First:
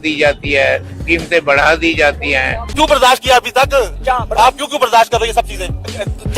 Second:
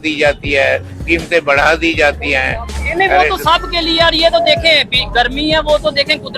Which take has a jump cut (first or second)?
first